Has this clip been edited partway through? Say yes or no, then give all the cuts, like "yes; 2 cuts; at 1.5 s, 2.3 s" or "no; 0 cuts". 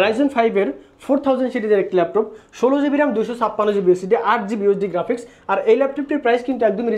no; 0 cuts